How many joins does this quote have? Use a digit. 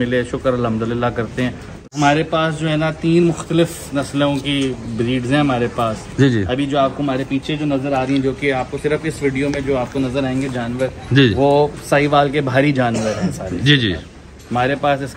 1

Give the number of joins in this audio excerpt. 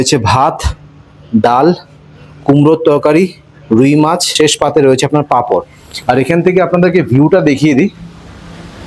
2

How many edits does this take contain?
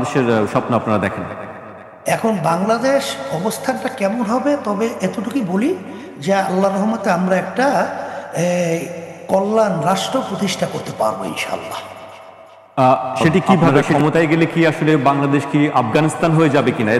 1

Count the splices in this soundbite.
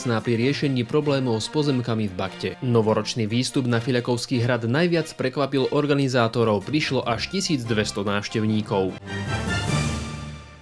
1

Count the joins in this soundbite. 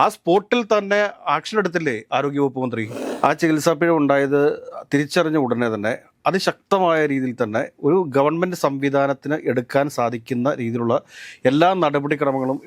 1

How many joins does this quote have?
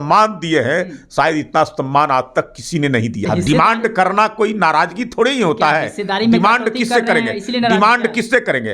1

